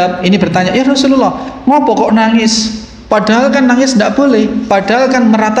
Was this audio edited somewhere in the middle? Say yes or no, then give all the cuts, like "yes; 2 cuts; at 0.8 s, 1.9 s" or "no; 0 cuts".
no; 0 cuts